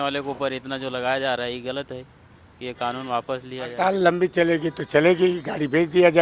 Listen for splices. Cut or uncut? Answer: cut